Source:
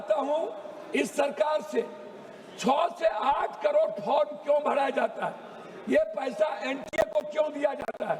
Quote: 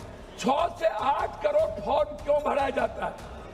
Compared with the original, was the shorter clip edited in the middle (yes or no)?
no